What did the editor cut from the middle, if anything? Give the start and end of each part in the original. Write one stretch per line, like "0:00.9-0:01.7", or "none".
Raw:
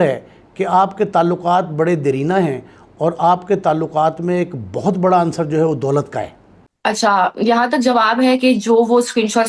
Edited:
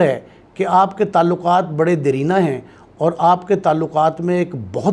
none

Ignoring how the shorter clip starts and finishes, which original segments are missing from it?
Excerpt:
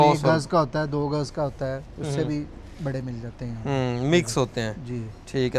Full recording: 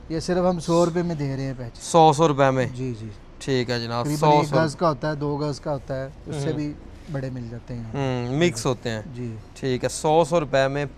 none

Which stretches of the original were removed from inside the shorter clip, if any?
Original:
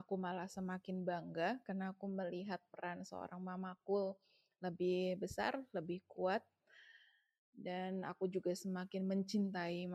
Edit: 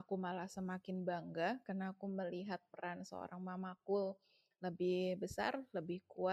none

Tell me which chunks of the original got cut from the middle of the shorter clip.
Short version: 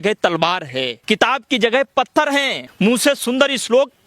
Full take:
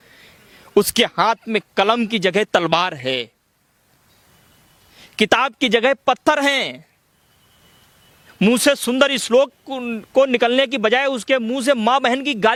0:03.3-0:05.1
0:06.7-0:08.2

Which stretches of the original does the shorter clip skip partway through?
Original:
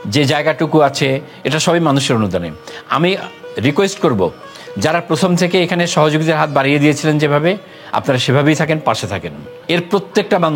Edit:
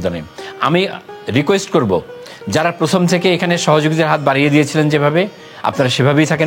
none

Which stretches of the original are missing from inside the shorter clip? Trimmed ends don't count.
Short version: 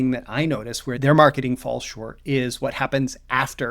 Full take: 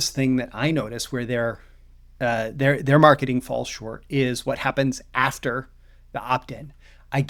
0:01.2-0:02.8

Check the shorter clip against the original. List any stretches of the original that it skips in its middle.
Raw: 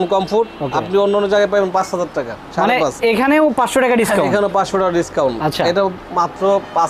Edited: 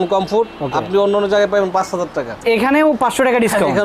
0:02.4-0:02.9

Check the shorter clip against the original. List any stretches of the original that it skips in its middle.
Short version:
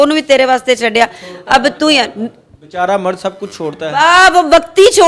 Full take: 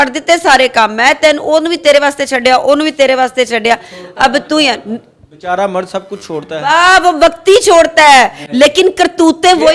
none

